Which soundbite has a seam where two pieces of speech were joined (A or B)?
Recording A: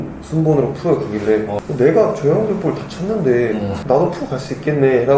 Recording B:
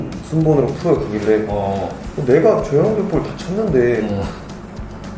A